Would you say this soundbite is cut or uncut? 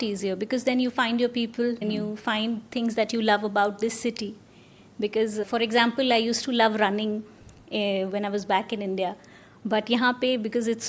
uncut